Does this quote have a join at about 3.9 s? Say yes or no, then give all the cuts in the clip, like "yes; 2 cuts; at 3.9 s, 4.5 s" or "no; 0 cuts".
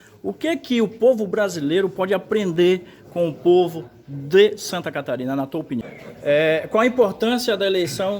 no; 1 cut; at 6.0 s